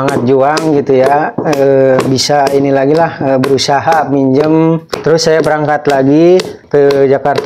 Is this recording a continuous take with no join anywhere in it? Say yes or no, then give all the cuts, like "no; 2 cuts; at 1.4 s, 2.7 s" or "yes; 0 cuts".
no; 2 cuts; at 4.9 s, 6.6 s